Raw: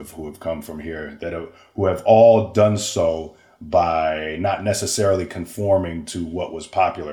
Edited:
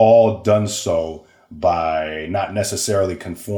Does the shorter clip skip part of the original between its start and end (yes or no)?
no